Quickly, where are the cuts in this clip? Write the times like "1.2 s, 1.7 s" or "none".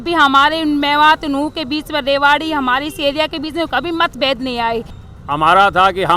5.0 s